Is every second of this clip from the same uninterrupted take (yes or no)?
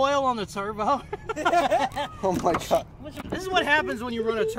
no